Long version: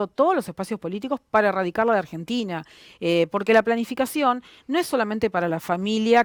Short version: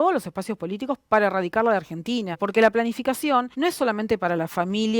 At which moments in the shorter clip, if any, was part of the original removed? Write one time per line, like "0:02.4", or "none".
0:02.4
0:03.5